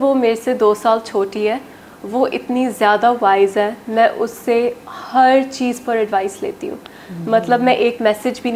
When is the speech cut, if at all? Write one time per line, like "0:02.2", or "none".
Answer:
none